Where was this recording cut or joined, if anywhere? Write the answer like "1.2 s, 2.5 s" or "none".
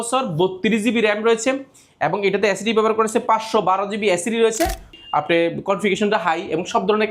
5.0 s